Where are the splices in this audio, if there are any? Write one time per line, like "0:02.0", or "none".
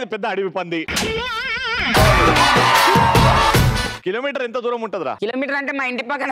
0:03.9
0:05.2